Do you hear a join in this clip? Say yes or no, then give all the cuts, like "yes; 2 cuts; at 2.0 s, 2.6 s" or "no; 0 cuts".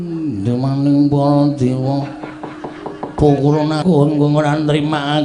yes; 1 cut; at 3.8 s